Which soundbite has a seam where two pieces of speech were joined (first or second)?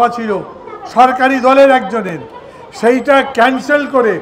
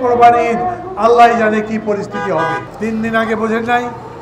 second